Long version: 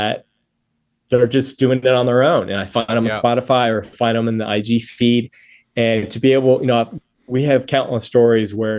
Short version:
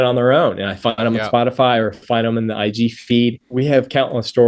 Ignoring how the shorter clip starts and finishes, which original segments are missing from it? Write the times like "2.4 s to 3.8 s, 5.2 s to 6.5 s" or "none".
5.3 s to 7.2 s